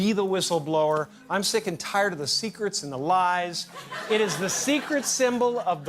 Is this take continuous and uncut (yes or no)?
no